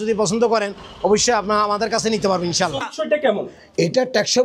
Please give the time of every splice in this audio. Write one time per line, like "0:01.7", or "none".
0:02.8